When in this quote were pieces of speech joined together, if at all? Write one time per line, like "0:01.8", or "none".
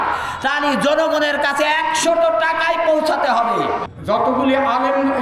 0:03.8